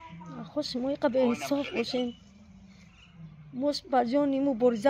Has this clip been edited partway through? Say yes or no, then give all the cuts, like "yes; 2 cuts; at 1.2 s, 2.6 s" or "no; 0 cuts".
no; 0 cuts